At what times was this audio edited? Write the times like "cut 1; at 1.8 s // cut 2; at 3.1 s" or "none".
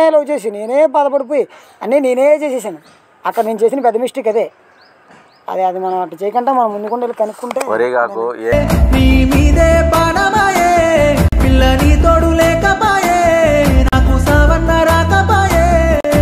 none